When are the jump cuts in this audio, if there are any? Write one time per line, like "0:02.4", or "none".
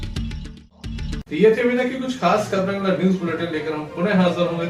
none